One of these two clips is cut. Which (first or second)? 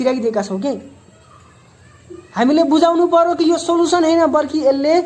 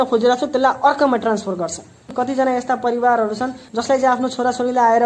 second